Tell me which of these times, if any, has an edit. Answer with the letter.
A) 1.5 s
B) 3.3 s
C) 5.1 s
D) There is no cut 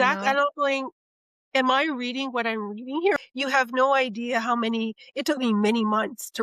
B